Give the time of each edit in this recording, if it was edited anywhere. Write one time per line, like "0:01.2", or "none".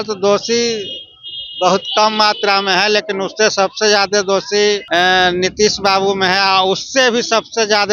0:04.8